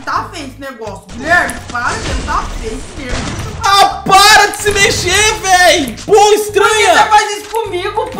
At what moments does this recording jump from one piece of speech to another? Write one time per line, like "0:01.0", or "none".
none